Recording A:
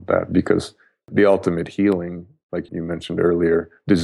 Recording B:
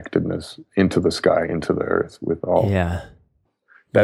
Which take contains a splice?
A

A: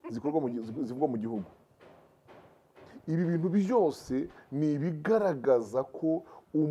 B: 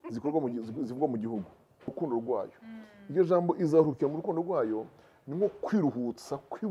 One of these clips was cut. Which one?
B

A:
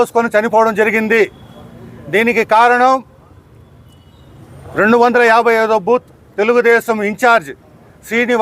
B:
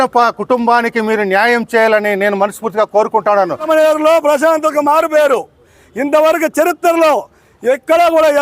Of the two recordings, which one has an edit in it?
B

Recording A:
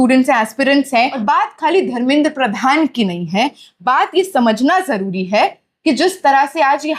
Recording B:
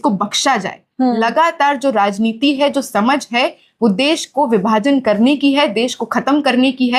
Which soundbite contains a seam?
A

